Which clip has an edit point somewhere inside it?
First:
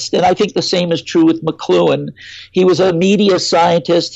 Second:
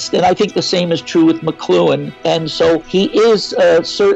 second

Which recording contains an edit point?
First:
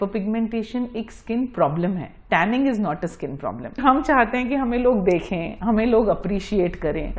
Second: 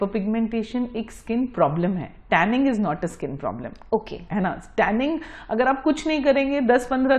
first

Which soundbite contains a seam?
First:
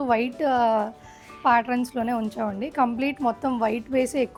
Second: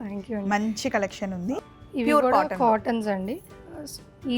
second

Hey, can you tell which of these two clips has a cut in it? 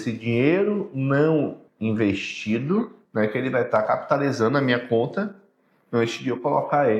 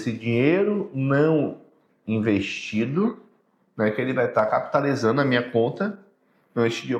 first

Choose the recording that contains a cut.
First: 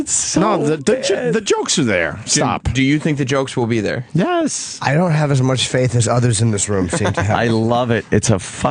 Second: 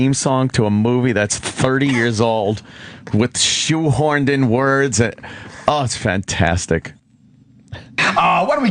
first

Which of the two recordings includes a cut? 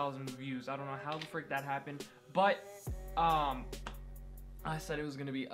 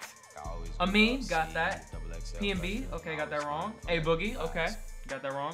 first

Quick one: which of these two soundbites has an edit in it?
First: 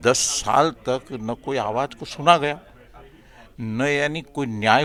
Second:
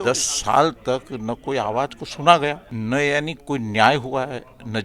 second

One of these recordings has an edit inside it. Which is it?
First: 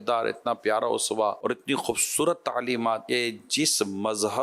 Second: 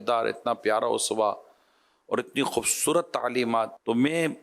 first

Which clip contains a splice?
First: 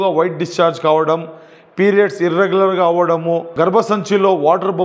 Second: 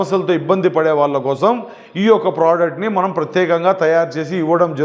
first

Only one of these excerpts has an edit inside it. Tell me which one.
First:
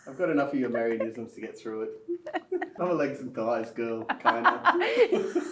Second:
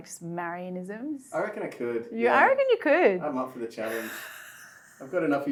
first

